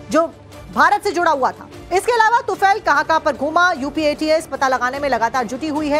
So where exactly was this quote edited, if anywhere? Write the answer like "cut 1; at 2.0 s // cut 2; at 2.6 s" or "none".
cut 1; at 2.8 s